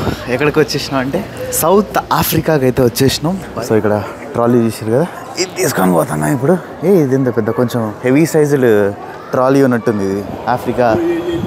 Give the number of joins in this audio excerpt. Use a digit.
5